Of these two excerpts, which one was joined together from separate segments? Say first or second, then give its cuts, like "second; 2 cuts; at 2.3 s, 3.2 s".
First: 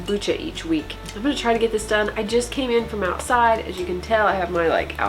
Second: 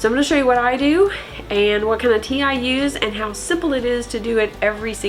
first; 1 cut; at 1.0 s